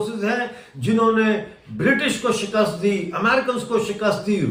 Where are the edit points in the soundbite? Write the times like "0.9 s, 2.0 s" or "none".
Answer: none

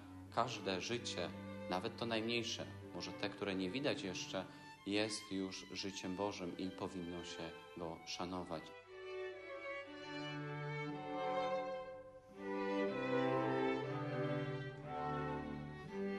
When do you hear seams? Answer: 8.7 s

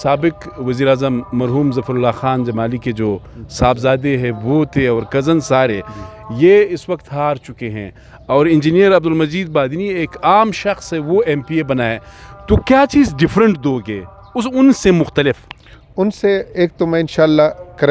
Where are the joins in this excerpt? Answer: none

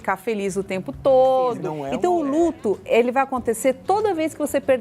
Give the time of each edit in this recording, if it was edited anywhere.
1.8 s

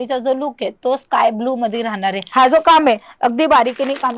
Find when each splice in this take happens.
2.2 s

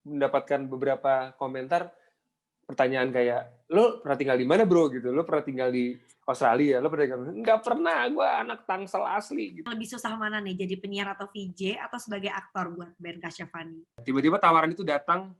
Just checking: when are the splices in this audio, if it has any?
9.7 s, 14.0 s

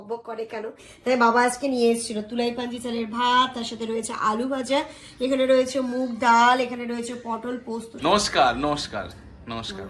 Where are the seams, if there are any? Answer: 0.9 s, 7.9 s

